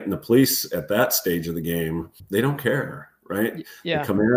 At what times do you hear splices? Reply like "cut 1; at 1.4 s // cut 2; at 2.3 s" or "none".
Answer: cut 1; at 2.2 s